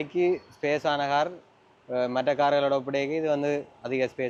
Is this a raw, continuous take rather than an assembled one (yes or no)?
yes